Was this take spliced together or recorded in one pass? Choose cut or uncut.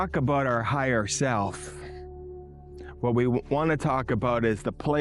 cut